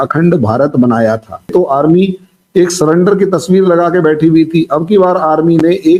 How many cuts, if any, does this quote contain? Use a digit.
1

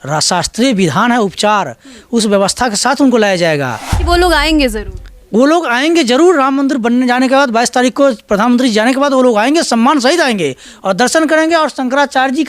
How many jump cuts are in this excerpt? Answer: 1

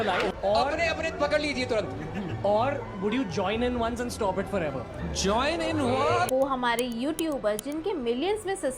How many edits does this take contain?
1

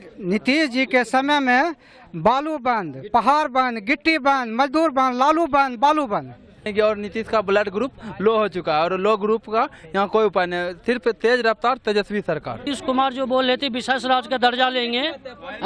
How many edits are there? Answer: 2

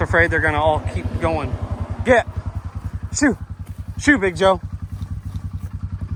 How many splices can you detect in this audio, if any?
0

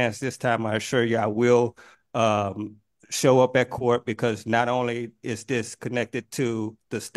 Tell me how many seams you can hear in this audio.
0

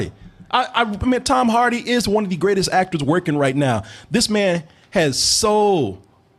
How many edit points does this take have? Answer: 0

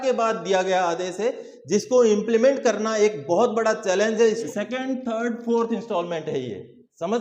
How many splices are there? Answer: 1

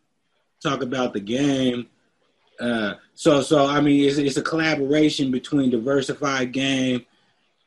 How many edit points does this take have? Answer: 0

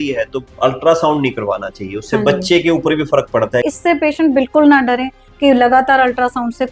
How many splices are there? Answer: 1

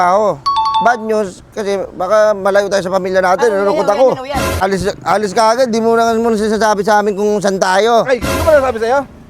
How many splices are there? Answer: 1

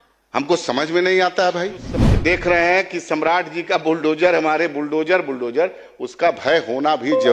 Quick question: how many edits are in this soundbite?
1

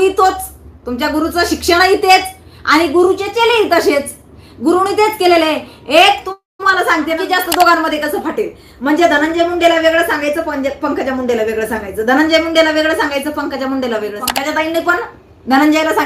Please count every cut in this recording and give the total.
2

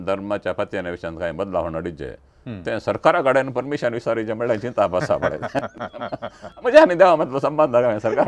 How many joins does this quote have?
0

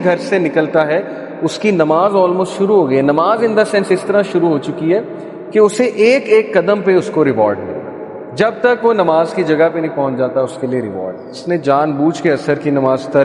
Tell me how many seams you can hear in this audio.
1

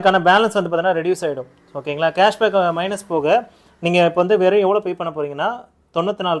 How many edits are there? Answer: 0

